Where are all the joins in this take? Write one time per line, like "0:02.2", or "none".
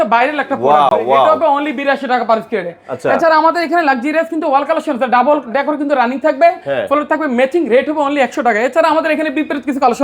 none